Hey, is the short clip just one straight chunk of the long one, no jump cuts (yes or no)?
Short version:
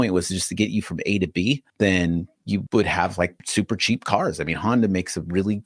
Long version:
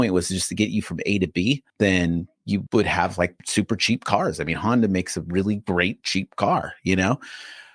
yes